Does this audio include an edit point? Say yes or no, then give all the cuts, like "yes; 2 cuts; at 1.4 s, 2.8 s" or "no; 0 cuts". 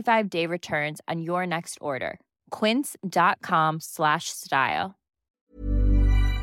yes; 1 cut; at 5.3 s